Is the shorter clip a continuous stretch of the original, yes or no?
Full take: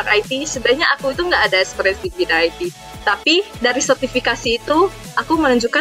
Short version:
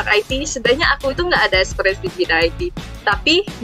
yes